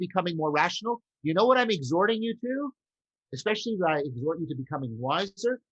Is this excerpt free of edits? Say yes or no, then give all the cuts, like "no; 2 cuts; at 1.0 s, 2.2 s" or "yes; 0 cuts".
yes; 0 cuts